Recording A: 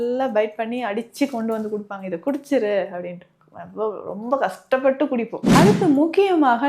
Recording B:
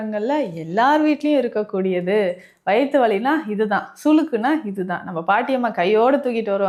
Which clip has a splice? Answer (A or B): A